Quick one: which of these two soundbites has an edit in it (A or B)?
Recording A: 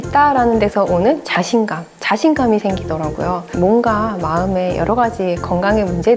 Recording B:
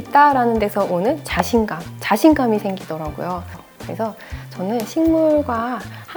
A